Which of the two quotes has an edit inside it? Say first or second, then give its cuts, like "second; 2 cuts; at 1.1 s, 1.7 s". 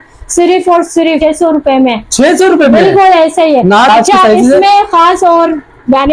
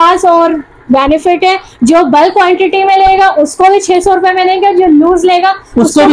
first; 2 cuts; at 1.2 s, 3.9 s